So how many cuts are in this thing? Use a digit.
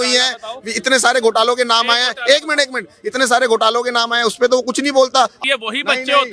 1